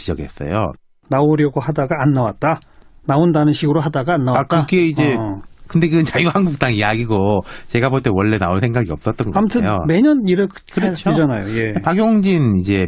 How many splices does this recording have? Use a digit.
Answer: 0